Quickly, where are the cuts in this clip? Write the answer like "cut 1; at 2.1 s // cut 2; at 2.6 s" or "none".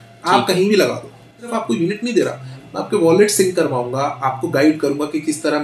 cut 1; at 1.5 s